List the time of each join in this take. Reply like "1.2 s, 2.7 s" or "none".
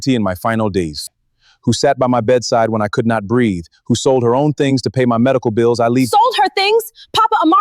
none